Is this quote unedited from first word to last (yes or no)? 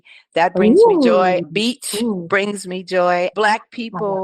no